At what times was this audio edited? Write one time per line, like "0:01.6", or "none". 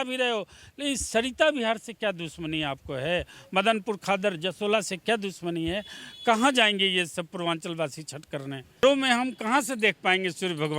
0:08.8